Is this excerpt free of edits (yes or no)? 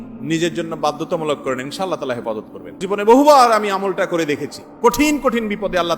no